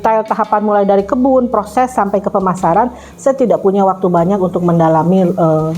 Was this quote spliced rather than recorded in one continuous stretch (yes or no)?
no